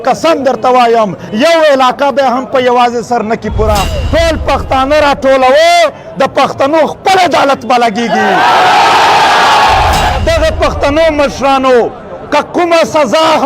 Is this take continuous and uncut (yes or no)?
no